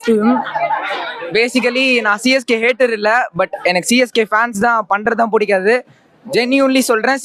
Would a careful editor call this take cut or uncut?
uncut